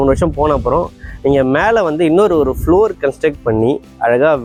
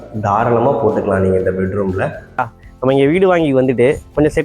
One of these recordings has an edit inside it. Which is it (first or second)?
second